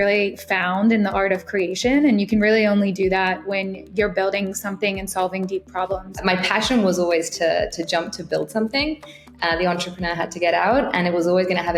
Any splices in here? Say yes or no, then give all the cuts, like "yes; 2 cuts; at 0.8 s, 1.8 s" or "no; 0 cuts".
yes; 1 cut; at 6.2 s